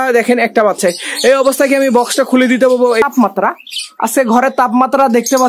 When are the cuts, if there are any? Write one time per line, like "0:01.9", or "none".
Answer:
0:03.0